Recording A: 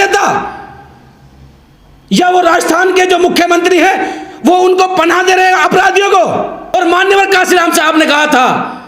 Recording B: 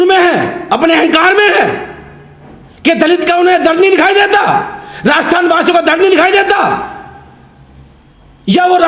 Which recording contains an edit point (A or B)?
A